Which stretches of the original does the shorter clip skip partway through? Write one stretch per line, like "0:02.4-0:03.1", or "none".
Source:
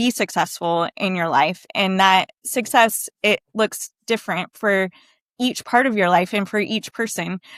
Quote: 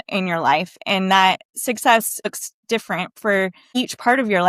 0:03.2-0:03.7
0:05.0-0:05.3